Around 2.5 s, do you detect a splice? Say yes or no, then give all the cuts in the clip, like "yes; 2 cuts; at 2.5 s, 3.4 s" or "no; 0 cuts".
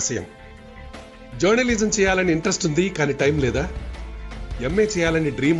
yes; 1 cut; at 2.5 s